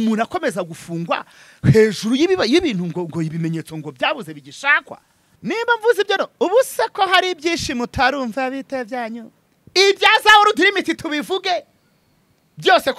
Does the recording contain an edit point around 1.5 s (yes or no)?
no